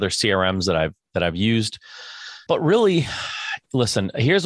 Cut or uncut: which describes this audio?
cut